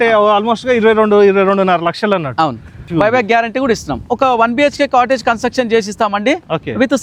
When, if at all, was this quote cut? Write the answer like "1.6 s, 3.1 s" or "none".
2.9 s, 4.1 s